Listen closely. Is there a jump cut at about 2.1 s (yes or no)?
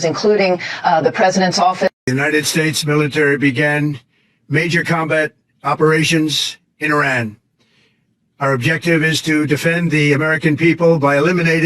yes